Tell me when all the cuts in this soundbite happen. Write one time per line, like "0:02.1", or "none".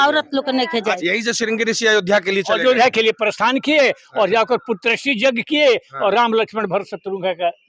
0:00.9